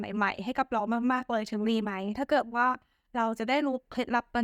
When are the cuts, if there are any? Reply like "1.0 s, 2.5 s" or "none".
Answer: 1.7 s

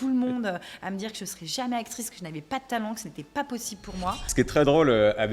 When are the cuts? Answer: 4.2 s

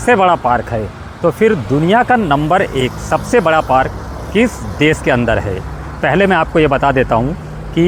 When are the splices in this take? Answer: none

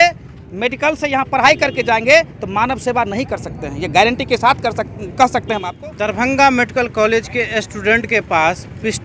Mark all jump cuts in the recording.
5.7 s

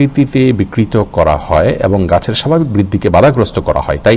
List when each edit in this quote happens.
none

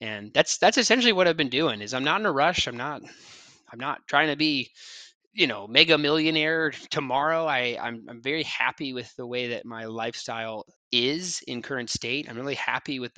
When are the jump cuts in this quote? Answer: 10.5 s

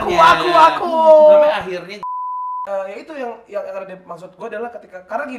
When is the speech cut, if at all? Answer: 2.2 s

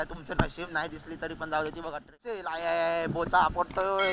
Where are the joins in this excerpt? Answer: 2.5 s

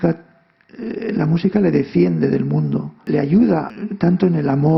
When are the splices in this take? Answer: 3.1 s, 3.7 s

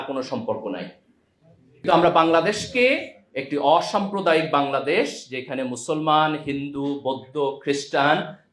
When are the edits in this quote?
1.8 s

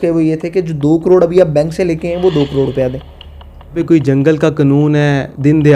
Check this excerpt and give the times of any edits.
3.8 s

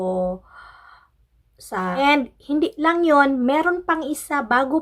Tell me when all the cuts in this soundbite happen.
1.9 s

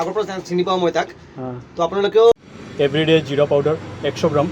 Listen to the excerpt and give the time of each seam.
2.3 s

